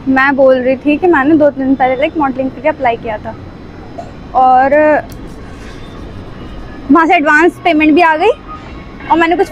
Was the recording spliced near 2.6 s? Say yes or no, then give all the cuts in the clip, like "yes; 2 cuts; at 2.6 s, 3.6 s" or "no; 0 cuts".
no; 0 cuts